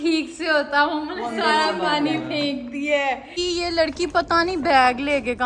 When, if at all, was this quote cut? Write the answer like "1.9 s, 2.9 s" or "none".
3.3 s